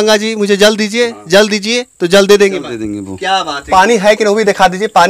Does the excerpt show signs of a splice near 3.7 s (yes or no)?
yes